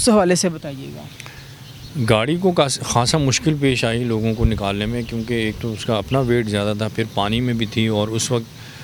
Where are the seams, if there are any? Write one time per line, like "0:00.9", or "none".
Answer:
none